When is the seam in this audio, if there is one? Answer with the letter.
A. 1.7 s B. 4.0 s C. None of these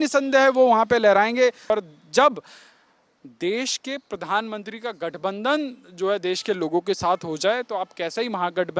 A